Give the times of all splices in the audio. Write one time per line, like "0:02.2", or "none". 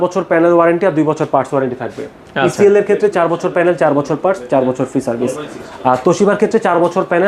none